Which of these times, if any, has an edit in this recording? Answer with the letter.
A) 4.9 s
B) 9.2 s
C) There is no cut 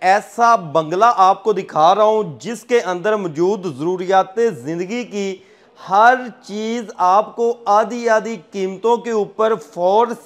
C